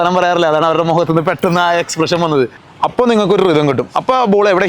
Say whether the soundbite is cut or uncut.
cut